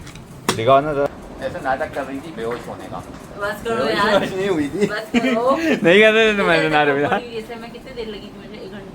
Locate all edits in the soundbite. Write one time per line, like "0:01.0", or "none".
0:01.1